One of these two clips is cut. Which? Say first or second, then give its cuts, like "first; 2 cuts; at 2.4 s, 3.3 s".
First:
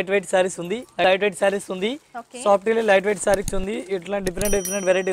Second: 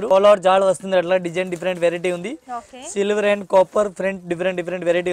first; 1 cut; at 1.0 s